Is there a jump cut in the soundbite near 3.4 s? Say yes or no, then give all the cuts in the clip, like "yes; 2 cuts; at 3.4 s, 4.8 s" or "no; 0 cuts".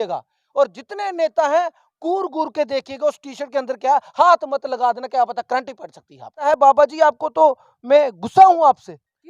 no; 1 cut; at 6.5 s